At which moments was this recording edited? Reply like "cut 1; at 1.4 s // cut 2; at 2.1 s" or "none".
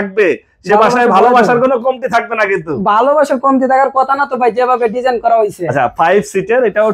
none